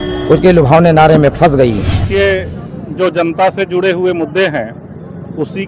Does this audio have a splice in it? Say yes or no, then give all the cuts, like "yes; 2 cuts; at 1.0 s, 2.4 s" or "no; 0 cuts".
yes; 1 cut; at 1.9 s